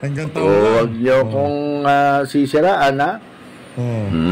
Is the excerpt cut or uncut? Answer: uncut